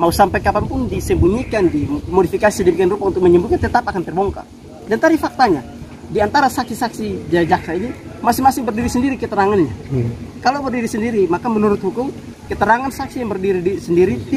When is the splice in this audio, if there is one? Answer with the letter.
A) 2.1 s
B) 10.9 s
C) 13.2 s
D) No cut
A